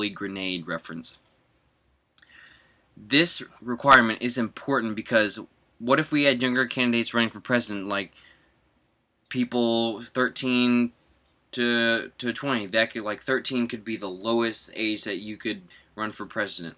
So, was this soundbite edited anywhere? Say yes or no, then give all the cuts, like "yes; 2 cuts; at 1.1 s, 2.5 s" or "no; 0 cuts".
no; 0 cuts